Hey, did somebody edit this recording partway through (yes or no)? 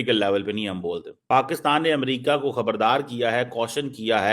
yes